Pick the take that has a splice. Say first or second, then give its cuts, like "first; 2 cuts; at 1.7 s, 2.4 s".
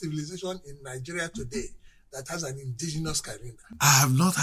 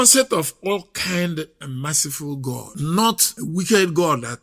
second; 2 cuts; at 2.7 s, 3.3 s